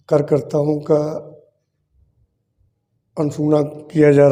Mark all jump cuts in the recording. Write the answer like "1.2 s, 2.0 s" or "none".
none